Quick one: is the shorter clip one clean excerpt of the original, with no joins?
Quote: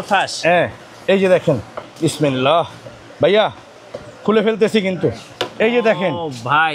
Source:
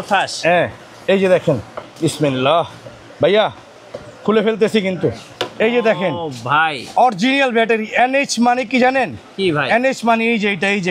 yes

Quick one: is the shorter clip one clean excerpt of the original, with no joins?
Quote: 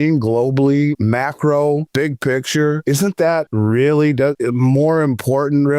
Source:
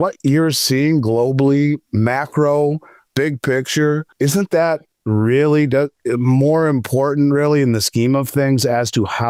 no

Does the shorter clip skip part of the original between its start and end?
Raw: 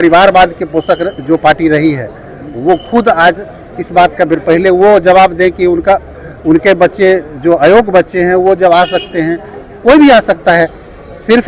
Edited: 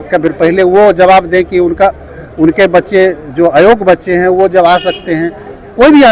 no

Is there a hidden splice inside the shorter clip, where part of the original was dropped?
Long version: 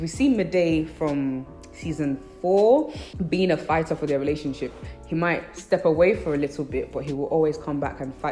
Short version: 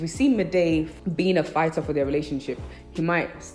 yes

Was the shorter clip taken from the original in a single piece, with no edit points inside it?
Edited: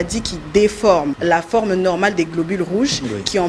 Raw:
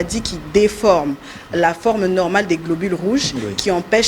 no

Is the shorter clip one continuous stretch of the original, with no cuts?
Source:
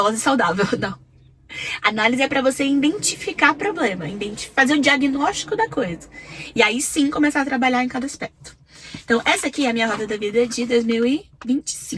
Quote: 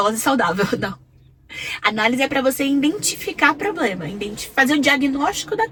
yes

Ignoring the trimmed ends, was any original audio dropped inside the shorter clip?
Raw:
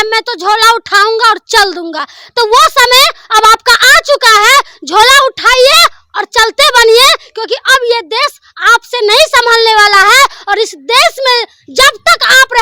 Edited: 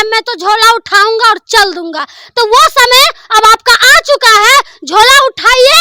no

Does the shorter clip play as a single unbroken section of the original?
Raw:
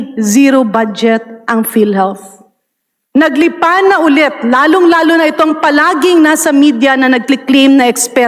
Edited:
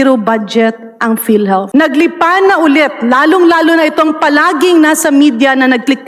no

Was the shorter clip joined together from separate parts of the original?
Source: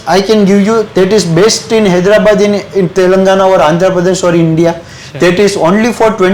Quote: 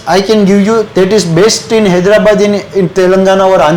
no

